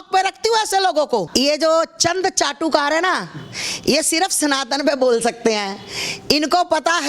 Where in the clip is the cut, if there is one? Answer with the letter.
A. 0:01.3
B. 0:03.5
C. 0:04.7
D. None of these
A